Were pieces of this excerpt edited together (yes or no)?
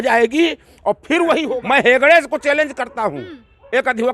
yes